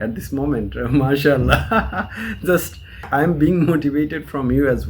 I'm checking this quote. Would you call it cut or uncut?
uncut